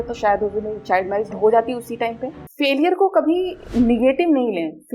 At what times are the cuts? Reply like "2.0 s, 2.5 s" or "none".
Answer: 2.4 s